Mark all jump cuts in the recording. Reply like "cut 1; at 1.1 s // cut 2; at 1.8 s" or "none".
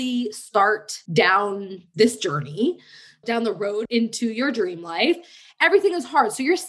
cut 1; at 1.3 s // cut 2; at 3.8 s